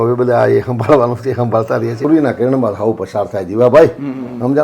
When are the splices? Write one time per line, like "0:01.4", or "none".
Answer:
0:02.0